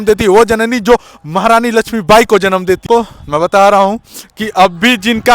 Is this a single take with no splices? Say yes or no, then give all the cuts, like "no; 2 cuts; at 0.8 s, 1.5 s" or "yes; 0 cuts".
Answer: no; 1 cut; at 2.8 s